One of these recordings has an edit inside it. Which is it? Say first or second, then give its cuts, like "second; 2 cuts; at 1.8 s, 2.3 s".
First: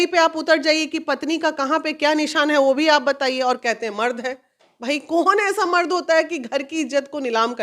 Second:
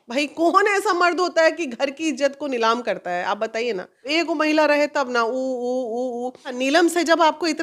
second; 2 cuts; at 4.0 s, 6.5 s